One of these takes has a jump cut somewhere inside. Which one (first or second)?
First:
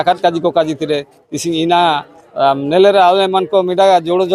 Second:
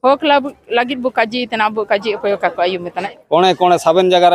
second